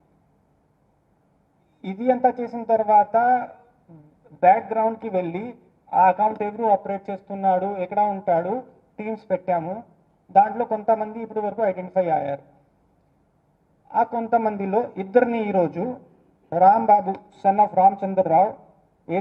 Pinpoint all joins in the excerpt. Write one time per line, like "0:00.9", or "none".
none